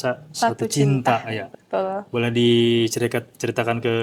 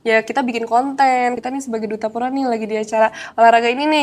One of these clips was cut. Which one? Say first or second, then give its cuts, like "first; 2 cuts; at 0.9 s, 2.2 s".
second; 1 cut; at 1.3 s